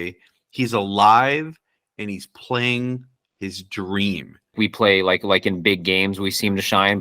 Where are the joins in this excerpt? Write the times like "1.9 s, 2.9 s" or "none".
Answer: 4.5 s